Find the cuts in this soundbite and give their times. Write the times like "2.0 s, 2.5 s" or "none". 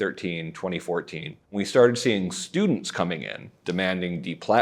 1.5 s